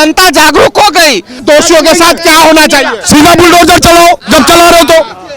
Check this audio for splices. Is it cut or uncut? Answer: cut